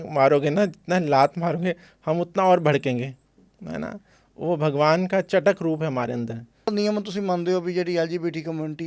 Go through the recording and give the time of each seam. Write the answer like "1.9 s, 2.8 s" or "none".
6.5 s